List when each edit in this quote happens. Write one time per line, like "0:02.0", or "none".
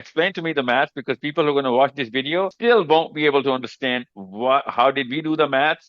0:02.5